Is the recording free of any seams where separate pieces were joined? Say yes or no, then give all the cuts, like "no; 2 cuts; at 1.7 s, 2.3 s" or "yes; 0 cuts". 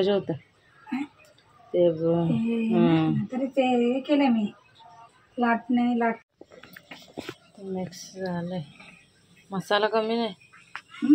no; 1 cut; at 6.2 s